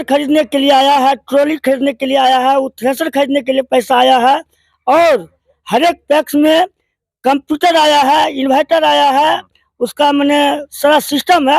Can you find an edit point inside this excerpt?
no; 0 cuts

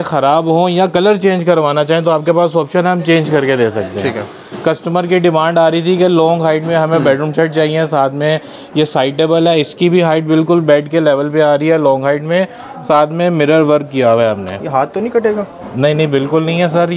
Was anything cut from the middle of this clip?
no; 0 cuts

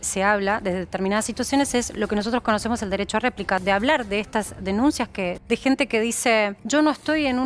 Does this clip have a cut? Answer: yes; 3 cuts; at 3.6 s, 5.4 s, 6.6 s

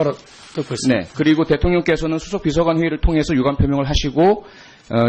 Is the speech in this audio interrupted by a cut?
yes; 1 cut; at 2.2 s

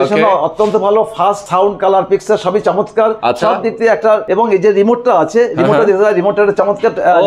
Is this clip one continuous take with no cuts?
no; 2 cuts; at 1.4 s, 4.2 s

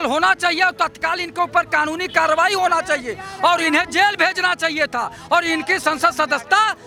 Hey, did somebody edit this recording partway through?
no; 0 cuts

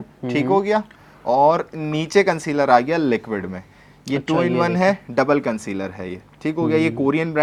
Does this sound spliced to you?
no; 0 cuts

